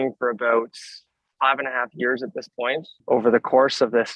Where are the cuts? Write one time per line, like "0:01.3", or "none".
0:03.0